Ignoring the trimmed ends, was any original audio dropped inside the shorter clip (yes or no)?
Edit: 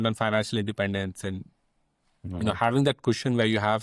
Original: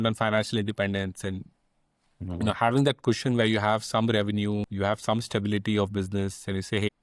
no